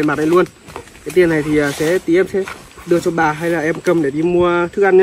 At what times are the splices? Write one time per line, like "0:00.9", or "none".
none